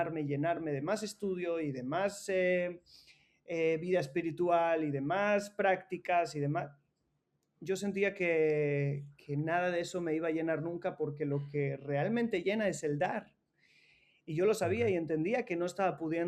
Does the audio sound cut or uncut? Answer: uncut